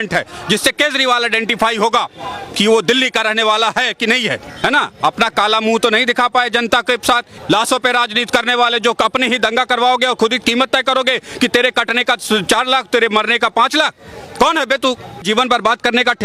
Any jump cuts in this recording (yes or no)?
yes